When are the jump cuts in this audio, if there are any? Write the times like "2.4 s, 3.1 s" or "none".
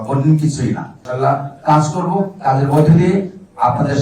1.0 s